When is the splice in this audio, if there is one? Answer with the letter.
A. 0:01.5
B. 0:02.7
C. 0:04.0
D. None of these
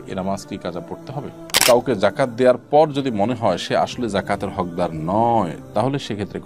A